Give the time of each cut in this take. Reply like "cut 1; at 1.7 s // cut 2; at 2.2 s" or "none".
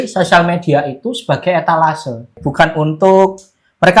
cut 1; at 2.4 s